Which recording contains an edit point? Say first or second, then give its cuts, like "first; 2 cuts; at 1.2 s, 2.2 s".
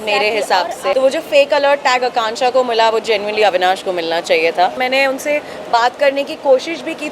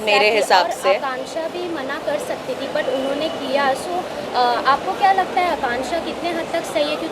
first; 2 cuts; at 0.9 s, 4.8 s